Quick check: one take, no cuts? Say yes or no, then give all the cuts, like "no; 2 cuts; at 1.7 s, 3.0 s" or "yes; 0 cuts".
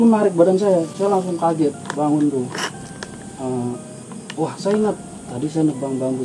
yes; 0 cuts